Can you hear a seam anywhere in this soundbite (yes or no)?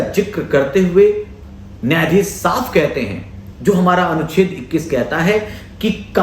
no